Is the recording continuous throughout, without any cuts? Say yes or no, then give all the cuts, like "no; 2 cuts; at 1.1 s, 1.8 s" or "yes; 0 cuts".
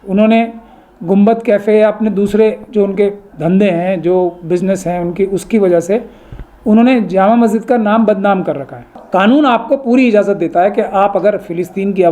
no; 1 cut; at 9.0 s